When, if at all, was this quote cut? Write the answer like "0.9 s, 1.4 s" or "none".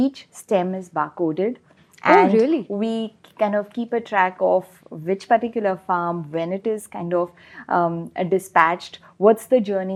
none

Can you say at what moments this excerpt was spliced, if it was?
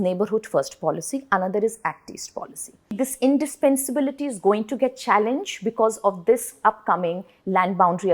2.9 s

